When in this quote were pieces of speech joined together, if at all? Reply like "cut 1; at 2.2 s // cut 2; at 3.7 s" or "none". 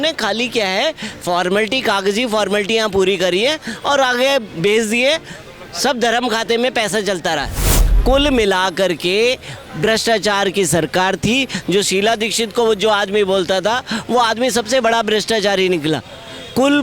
cut 1; at 7.9 s